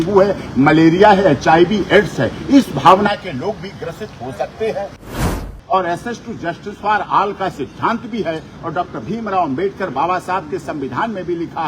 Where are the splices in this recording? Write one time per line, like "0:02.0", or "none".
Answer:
0:05.2